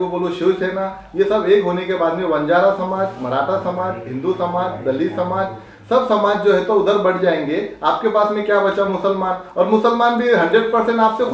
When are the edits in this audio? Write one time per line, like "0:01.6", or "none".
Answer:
none